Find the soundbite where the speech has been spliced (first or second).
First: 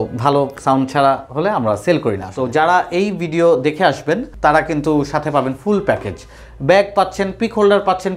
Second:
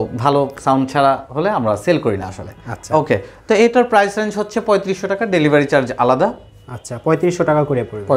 first